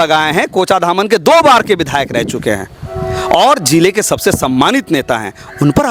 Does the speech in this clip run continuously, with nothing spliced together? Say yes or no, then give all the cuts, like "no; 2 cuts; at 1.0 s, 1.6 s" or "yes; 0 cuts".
yes; 0 cuts